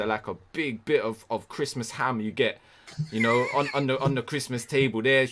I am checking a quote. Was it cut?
no; 0 cuts

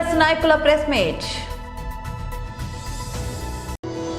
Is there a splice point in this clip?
yes; 1 cut; at 1.4 s

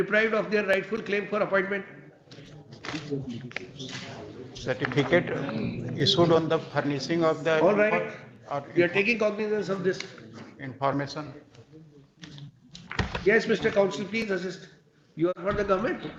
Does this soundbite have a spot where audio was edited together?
no; 0 cuts

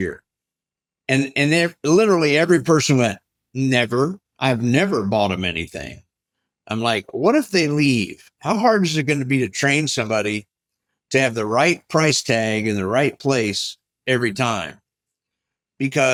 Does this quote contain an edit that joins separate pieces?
no; 0 cuts

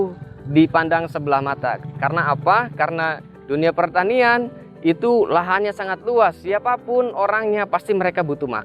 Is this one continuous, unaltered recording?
no; 1 cut; at 1.8 s

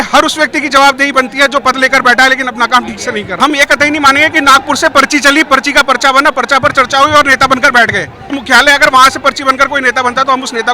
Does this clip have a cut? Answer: yes; 2 cuts; at 3.3 s, 8.3 s

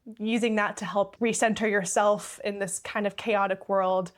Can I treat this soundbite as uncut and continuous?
no; 1 cut; at 1.1 s

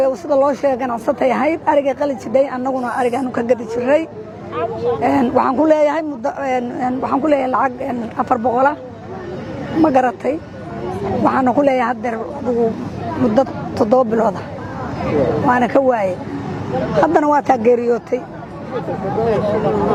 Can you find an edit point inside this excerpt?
no; 0 cuts

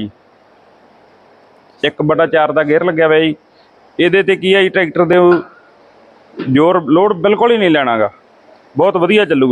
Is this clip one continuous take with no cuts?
yes; 0 cuts

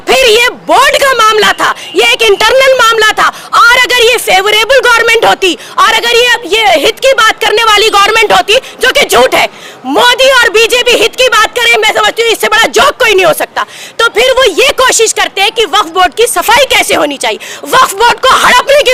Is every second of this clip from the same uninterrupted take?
yes; 0 cuts

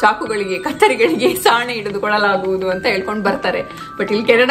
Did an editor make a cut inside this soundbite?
no; 0 cuts

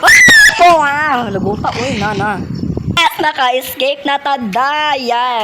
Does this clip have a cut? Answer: yes; 1 cut; at 3.0 s

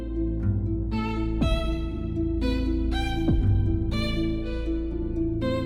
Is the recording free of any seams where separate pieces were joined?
yes; 0 cuts

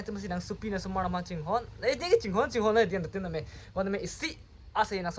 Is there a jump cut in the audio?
no; 0 cuts

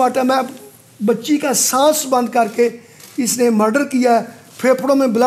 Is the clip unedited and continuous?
yes; 0 cuts

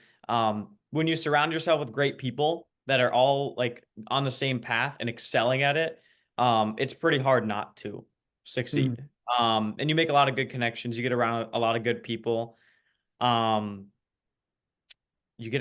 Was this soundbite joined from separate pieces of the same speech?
no; 0 cuts

